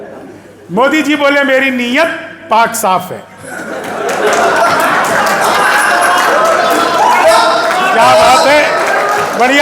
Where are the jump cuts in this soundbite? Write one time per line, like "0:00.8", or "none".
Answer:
none